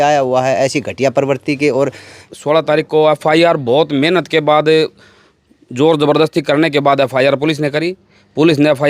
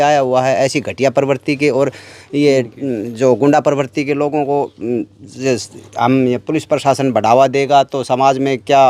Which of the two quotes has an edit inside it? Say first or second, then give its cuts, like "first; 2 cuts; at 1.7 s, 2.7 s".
first; 1 cut; at 2.2 s